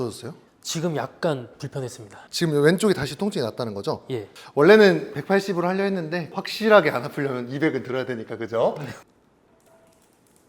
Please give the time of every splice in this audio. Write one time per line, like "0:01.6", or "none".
0:04.3
0:09.0